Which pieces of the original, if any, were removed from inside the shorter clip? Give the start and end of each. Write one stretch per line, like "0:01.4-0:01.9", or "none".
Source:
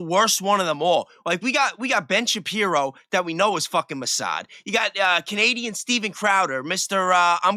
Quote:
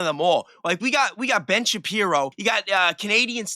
0:03.0-0:04.6

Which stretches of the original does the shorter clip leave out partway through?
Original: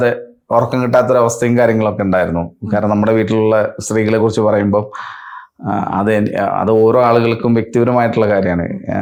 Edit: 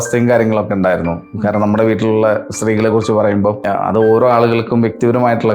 0:04.9-0:06.3

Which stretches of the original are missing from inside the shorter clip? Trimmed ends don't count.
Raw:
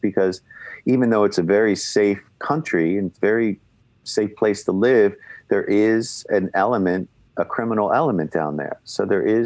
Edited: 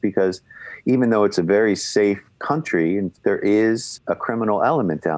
0:03.1-0:05.4
0:06.2-0:07.2

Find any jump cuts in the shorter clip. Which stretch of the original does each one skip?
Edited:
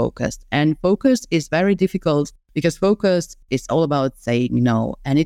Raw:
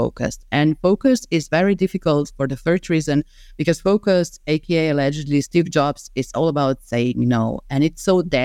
0:02.3-0:03.4
0:04.4-0:06.0

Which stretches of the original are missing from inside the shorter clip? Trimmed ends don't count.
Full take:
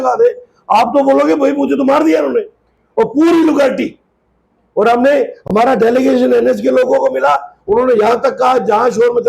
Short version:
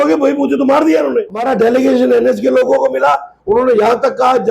0:02.6-0:05.6

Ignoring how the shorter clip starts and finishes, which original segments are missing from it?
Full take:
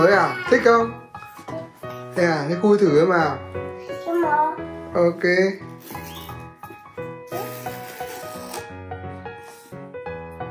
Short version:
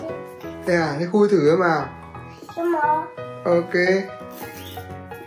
0:05.6-0:08.2

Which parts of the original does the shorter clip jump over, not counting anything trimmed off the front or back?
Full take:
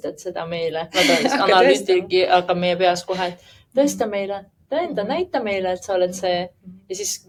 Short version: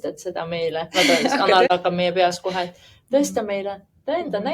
0:01.7-0:02.3

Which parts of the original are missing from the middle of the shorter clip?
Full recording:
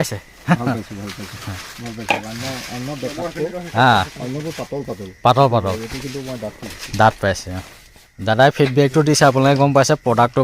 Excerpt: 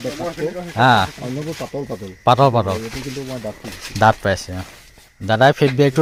none

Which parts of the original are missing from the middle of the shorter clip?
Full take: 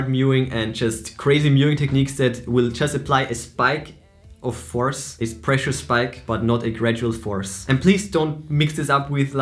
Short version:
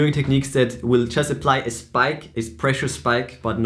0:03.9-0:05.1

